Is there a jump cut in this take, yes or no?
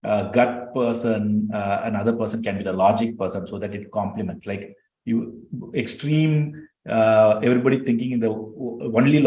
no